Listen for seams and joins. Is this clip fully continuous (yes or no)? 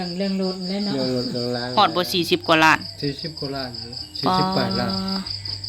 no